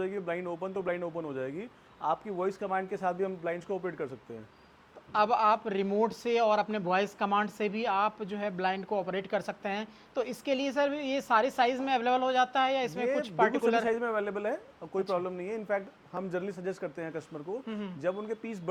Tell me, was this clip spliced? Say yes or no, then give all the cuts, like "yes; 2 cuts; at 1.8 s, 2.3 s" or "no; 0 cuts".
no; 0 cuts